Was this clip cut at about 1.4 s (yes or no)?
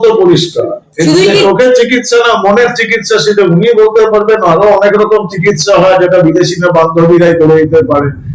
yes